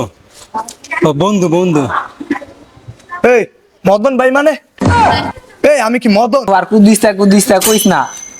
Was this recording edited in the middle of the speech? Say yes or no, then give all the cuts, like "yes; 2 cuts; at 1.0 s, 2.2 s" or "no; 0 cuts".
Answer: yes; 1 cut; at 6.5 s